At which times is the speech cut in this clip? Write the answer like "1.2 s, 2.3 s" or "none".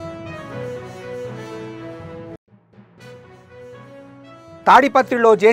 1.0 s, 2.1 s